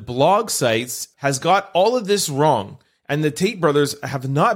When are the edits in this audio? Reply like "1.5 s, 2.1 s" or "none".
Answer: 1.1 s